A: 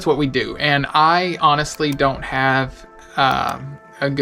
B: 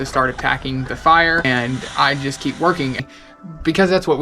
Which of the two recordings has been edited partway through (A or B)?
B